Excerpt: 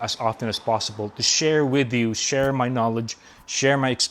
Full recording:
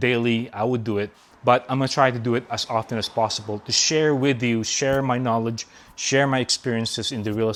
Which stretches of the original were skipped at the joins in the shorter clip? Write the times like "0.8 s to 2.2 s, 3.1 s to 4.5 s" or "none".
none